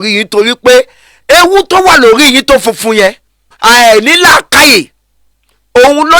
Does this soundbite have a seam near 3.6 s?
yes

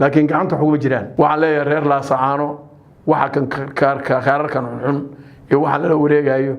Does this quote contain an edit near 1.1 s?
yes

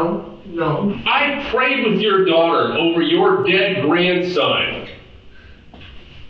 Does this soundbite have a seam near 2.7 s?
no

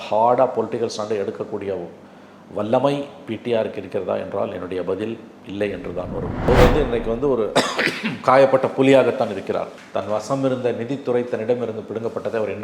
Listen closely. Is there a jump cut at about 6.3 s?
yes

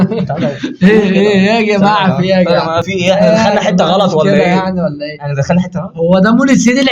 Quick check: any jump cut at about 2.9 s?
yes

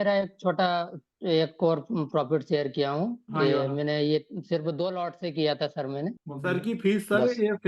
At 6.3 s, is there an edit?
yes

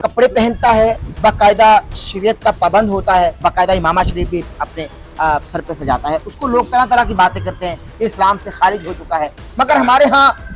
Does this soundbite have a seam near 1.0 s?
yes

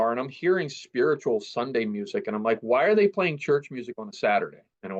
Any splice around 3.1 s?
no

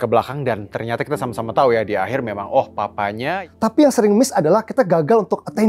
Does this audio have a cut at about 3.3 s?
yes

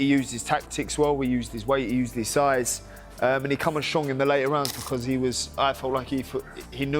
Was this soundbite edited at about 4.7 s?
yes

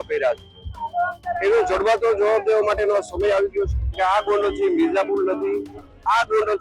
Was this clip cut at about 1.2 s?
no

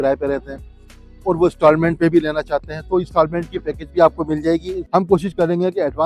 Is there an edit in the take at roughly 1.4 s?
no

